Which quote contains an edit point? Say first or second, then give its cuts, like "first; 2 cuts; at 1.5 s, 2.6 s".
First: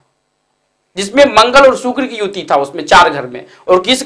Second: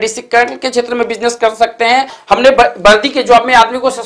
second; 1 cut; at 2.2 s